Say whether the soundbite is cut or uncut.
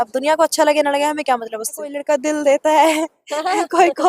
cut